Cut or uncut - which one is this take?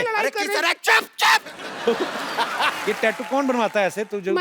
cut